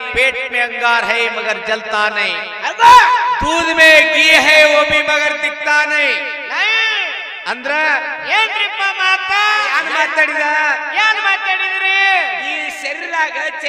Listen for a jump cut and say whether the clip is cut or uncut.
cut